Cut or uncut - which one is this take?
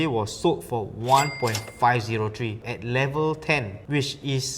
cut